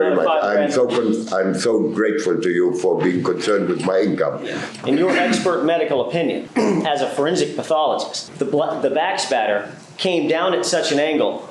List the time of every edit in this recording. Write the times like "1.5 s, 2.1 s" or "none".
4.6 s, 6.4 s, 8.2 s